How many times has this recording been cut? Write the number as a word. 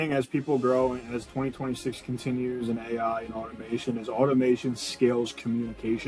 zero